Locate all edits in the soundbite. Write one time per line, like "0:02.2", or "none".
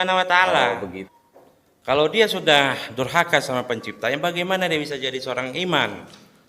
0:01.0